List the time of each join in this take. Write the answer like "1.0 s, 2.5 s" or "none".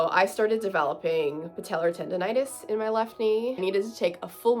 3.6 s